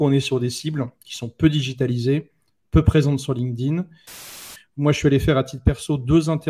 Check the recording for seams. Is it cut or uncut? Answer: cut